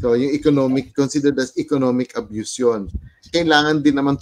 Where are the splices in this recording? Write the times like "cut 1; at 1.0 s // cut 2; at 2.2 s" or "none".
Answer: cut 1; at 3.3 s